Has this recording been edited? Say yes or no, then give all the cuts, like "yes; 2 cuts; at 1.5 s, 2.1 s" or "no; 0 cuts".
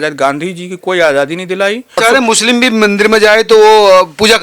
yes; 1 cut; at 2.0 s